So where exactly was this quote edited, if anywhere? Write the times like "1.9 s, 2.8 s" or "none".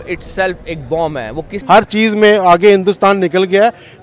1.6 s